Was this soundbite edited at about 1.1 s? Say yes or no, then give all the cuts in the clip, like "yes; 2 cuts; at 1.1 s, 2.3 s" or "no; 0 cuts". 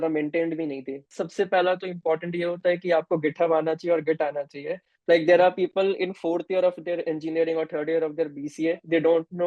yes; 1 cut; at 1.1 s